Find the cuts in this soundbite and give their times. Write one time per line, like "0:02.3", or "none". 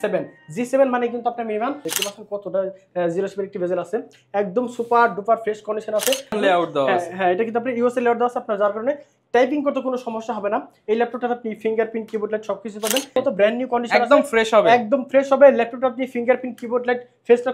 0:01.9
0:06.4
0:13.2